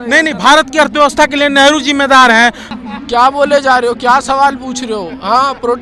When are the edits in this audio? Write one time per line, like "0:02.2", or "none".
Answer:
0:02.6